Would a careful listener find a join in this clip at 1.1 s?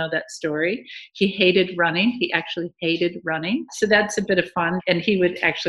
no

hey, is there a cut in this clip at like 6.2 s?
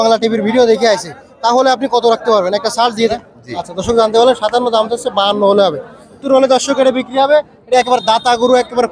yes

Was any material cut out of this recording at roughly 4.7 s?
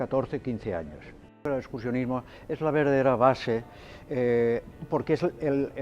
no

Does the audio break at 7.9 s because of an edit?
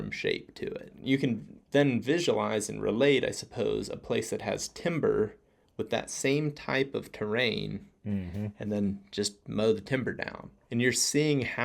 no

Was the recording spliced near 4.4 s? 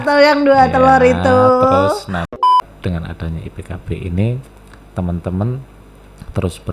no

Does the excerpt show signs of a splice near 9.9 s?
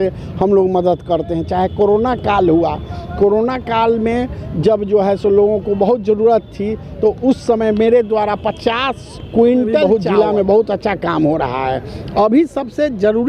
yes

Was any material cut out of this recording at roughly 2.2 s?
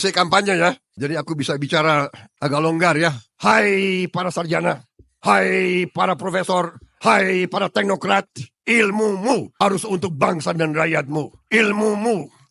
yes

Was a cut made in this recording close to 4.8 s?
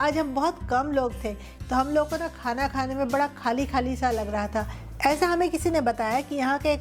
yes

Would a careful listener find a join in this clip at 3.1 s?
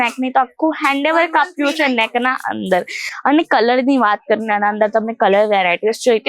no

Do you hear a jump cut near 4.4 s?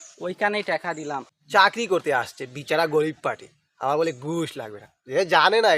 no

